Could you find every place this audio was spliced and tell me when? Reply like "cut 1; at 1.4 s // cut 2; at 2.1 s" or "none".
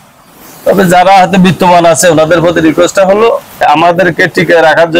cut 1; at 3.6 s